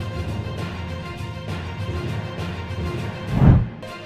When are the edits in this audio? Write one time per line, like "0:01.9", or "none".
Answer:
0:03.1